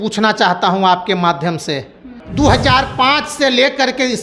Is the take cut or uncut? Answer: cut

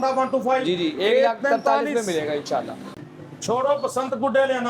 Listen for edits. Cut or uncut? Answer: cut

